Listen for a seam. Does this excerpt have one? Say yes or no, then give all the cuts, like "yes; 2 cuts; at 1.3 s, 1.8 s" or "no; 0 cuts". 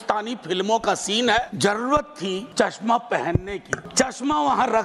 yes; 3 cuts; at 1.5 s, 2.5 s, 3.8 s